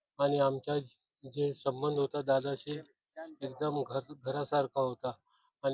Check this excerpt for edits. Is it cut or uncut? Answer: uncut